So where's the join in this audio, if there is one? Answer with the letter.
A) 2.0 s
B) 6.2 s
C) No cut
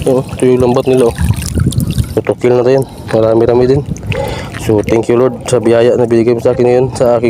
A